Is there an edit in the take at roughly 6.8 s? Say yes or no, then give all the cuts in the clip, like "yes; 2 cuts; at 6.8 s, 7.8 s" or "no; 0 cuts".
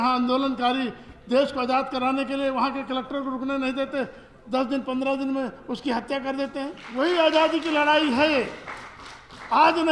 yes; 1 cut; at 6.8 s